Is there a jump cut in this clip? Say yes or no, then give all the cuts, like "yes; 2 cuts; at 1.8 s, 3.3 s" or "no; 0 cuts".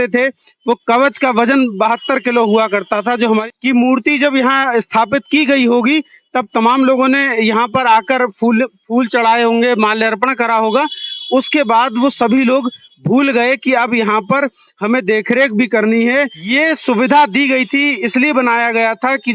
yes; 2 cuts; at 3.5 s, 16.4 s